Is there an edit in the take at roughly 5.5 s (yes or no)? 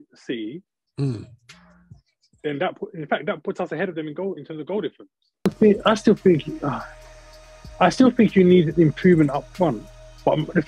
yes